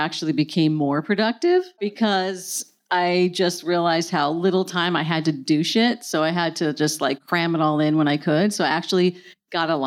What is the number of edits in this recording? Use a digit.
1